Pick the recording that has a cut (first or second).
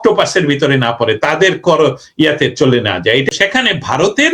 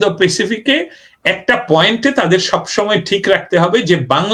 first